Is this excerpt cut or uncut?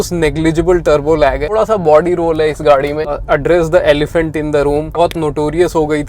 cut